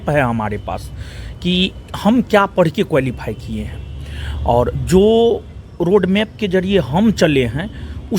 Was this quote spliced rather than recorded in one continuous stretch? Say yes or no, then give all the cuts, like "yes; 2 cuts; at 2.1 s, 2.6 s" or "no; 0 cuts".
no; 0 cuts